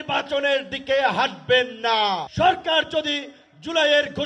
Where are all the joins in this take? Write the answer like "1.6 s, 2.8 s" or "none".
2.3 s